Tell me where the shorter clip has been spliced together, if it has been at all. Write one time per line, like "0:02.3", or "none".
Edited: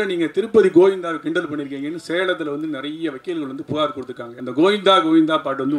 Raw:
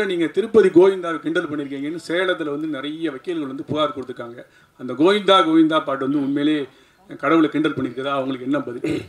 0:04.3